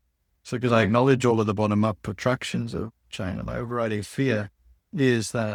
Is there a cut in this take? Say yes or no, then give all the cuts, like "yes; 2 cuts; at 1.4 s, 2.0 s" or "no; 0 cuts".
no; 0 cuts